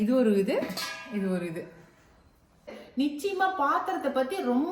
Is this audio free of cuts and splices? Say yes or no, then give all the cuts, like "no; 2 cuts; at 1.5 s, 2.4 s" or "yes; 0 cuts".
no; 1 cut; at 2.8 s